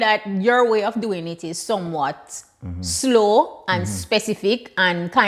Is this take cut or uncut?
uncut